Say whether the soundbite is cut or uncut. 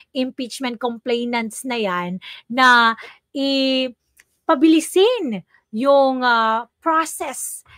uncut